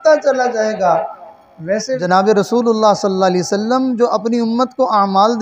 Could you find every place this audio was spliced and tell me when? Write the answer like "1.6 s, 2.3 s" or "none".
2.0 s